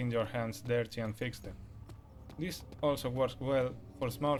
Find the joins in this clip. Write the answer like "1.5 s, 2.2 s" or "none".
none